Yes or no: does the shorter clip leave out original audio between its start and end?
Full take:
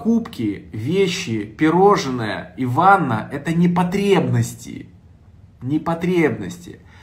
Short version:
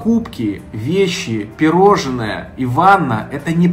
no